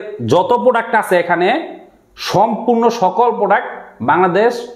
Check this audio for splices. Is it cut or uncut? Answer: uncut